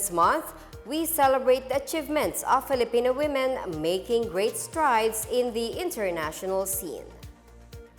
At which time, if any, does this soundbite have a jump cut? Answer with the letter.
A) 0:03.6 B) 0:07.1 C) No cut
B